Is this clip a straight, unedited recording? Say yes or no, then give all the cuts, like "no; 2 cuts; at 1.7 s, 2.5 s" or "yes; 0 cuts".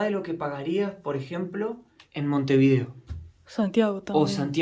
yes; 0 cuts